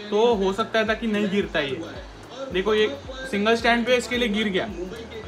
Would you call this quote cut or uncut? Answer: uncut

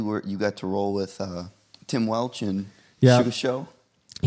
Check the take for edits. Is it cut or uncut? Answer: uncut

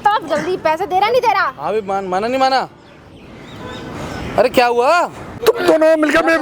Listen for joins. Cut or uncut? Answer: uncut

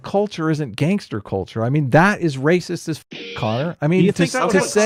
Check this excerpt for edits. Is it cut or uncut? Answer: uncut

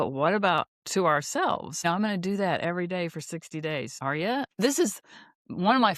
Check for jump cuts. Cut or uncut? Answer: cut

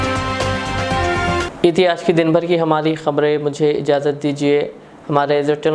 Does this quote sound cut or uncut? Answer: uncut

